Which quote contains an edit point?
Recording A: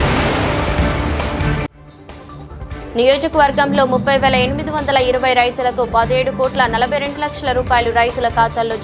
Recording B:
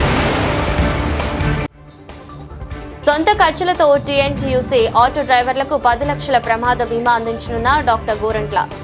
B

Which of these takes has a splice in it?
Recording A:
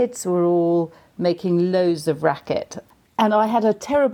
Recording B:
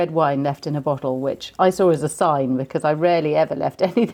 A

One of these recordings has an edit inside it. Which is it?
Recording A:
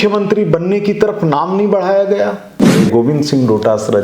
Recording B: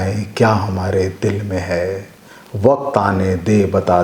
A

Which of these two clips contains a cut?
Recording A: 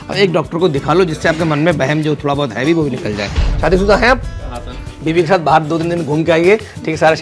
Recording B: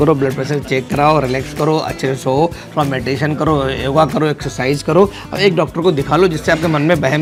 A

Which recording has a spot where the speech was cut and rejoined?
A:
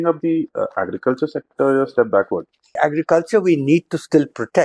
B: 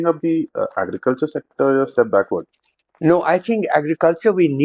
A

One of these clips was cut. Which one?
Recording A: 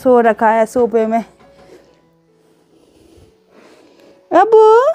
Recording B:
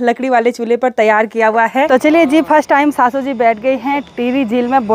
B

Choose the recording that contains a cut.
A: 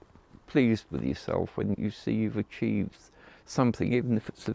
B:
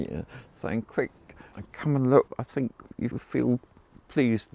B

